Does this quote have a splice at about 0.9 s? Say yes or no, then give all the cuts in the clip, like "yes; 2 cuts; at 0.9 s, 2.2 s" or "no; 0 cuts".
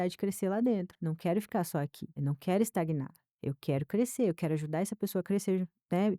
yes; 2 cuts; at 0.9 s, 2.0 s